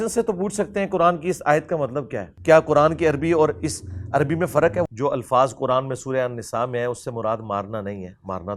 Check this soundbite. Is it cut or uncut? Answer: cut